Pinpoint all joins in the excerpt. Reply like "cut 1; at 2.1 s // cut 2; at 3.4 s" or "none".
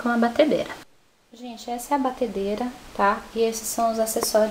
cut 1; at 1.8 s